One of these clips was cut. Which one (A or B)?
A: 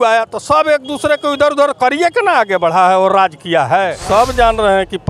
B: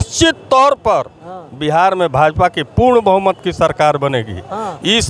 A